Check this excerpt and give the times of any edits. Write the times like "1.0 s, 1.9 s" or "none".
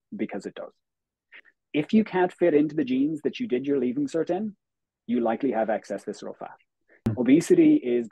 1.5 s, 7.1 s